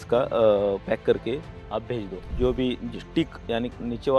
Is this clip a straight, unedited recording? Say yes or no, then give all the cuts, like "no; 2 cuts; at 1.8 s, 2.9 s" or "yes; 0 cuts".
no; 1 cut; at 2.2 s